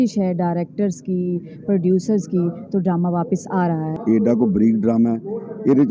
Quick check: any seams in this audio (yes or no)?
yes